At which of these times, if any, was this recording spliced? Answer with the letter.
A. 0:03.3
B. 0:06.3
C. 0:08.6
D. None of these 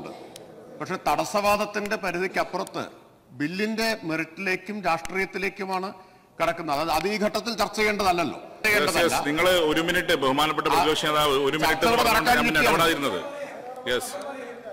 C